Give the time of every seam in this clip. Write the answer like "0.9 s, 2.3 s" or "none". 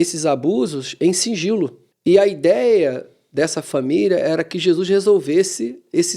1.9 s